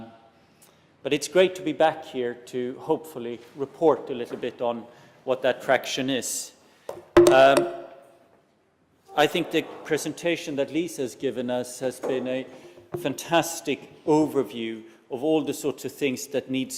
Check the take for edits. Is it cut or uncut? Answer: cut